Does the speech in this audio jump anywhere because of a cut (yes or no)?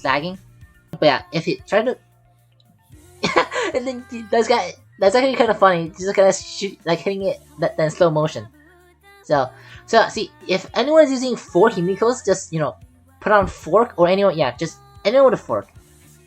yes